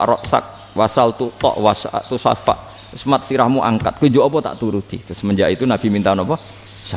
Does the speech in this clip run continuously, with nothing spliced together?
yes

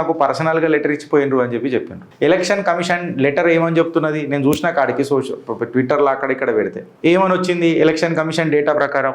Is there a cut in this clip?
yes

